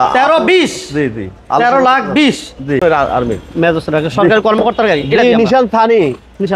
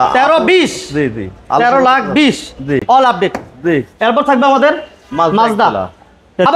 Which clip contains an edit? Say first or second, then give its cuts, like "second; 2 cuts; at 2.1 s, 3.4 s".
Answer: first; 1 cut; at 2.8 s